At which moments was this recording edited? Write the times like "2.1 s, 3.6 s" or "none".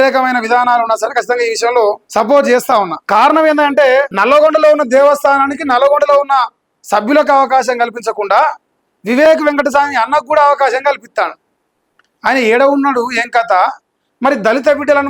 2.0 s, 3.0 s, 4.1 s

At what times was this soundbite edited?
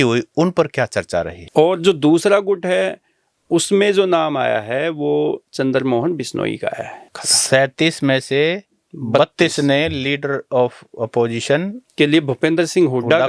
1.4 s, 7.3 s

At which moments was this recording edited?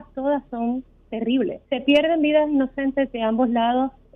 1.6 s

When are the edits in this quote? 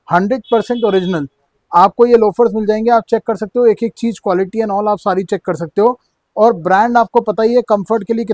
none

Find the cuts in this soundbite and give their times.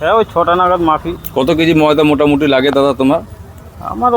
1.2 s

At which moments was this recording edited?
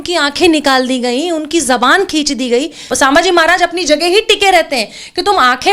2.8 s

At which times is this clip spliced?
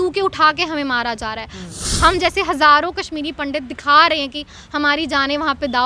1.7 s

